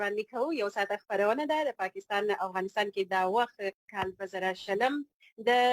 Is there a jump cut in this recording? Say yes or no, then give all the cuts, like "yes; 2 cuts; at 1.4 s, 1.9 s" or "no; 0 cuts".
yes; 1 cut; at 3.9 s